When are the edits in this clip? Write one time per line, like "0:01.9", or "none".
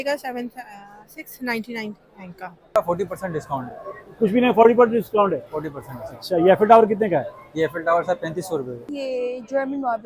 0:02.8
0:08.8